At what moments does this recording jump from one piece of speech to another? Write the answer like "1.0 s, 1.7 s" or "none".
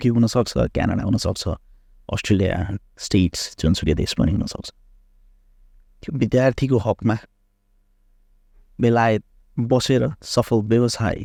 none